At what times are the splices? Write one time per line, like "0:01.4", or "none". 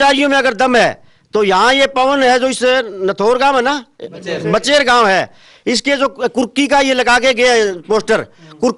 none